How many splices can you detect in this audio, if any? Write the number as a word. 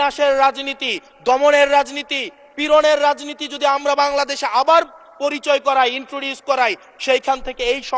zero